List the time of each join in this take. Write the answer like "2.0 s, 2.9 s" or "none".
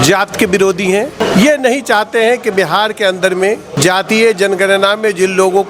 1.2 s, 3.7 s